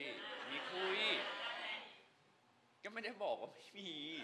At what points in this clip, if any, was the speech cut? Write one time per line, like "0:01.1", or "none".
none